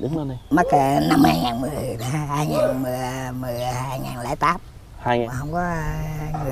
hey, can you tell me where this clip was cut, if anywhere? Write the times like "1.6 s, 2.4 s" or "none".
5.2 s